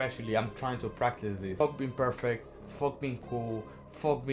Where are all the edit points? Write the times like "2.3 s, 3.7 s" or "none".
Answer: 1.6 s